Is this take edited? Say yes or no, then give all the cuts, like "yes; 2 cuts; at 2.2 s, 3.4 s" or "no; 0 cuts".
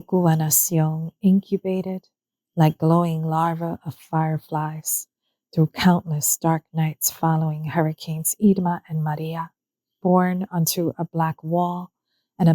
yes; 1 cut; at 10.0 s